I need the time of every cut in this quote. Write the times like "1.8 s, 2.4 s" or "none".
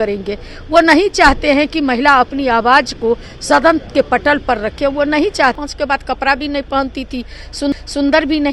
5.6 s